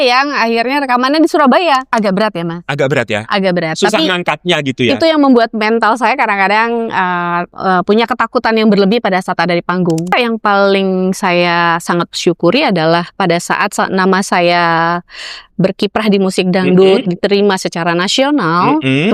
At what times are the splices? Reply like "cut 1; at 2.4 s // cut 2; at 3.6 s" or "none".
cut 1; at 1.9 s // cut 2; at 7.5 s // cut 3; at 10.1 s